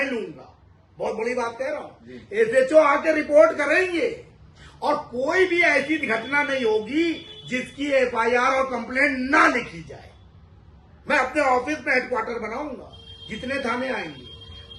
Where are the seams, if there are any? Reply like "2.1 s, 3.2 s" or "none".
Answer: none